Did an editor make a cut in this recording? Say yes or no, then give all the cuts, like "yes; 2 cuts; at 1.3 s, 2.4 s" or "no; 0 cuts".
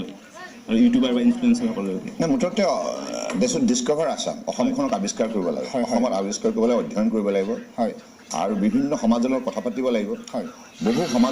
no; 0 cuts